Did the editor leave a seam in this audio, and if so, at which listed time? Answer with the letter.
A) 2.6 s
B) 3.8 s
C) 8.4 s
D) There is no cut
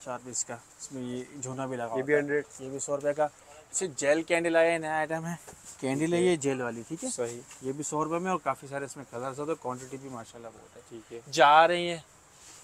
D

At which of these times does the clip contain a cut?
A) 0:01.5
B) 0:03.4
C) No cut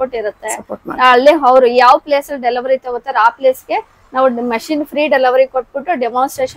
C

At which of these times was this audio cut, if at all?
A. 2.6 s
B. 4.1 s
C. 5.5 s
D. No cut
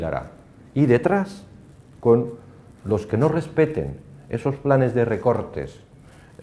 C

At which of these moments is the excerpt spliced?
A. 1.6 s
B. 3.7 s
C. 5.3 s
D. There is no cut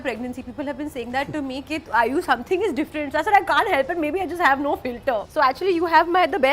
C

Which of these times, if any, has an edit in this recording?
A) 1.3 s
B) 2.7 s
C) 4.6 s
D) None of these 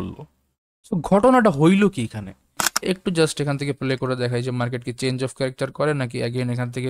B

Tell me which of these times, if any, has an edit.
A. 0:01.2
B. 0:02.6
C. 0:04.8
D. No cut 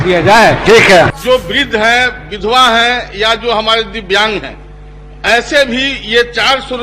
A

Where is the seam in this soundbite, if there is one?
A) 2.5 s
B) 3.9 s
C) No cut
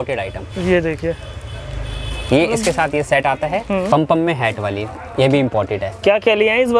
B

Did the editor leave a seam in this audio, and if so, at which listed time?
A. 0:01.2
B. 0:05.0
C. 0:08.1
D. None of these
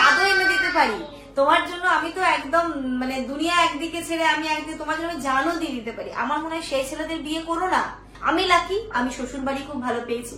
C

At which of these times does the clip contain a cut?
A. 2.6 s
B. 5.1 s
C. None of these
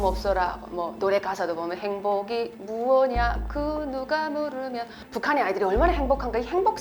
B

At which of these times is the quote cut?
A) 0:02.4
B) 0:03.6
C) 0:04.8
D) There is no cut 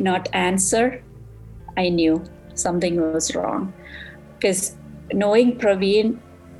D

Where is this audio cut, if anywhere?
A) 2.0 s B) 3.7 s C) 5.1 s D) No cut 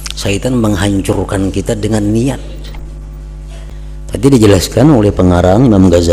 B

